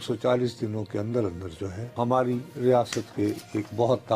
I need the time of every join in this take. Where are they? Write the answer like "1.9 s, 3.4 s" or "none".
1.9 s